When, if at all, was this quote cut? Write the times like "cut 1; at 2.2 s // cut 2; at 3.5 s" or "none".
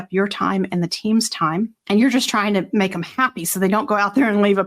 cut 1; at 1.8 s